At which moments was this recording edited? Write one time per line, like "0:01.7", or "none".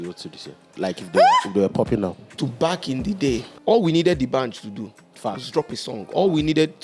0:02.4
0:03.5